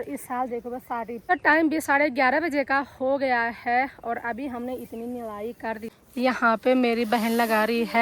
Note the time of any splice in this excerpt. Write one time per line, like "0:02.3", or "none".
0:01.3
0:05.9